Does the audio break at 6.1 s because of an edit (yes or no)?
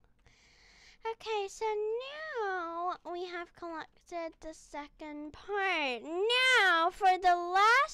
no